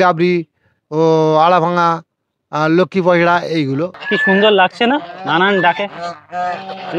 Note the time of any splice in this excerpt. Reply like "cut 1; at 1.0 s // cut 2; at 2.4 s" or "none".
cut 1; at 4.0 s